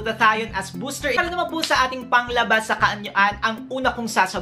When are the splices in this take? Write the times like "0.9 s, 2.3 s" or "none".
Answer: 1.2 s